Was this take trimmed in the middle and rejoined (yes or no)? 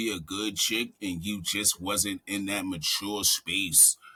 no